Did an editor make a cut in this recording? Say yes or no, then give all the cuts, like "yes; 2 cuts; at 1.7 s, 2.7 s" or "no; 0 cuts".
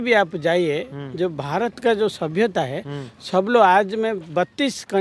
no; 0 cuts